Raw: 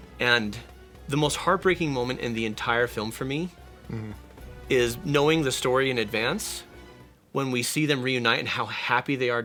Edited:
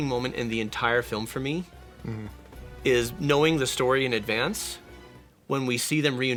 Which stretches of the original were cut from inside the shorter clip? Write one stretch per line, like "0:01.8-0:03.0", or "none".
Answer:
none